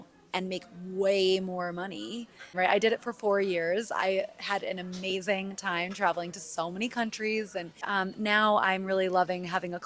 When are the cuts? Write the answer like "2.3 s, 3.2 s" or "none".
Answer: 2.5 s, 7.8 s